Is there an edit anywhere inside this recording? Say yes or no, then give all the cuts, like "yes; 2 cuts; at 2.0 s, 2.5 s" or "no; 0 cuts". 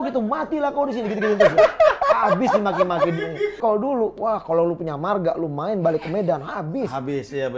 yes; 1 cut; at 3.6 s